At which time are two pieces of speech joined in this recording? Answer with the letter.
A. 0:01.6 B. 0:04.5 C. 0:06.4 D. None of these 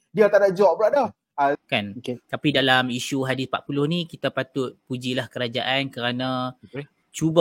A